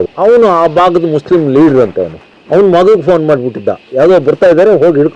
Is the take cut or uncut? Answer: uncut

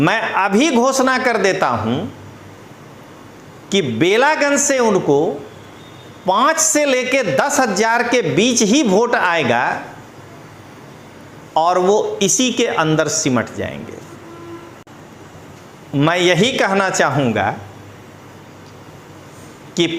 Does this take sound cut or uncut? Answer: cut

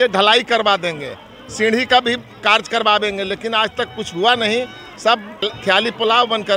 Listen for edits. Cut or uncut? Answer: cut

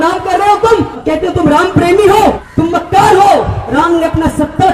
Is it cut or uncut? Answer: cut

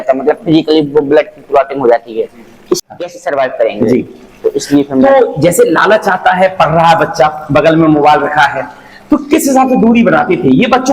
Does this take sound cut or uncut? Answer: cut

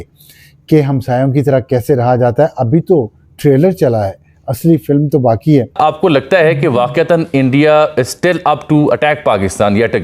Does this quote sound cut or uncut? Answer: cut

